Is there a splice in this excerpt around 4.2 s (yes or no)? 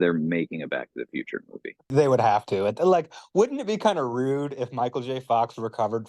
no